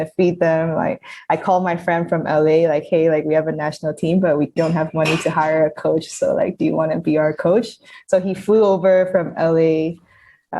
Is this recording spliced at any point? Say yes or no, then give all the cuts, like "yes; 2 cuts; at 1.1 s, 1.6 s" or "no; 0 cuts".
yes; 1 cut; at 4.6 s